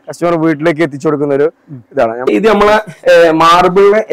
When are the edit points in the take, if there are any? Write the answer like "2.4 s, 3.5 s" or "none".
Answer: 2.3 s